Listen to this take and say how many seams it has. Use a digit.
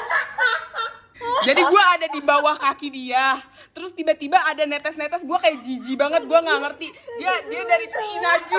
1